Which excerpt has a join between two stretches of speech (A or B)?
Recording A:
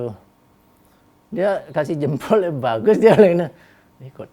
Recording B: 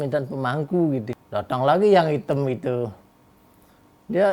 B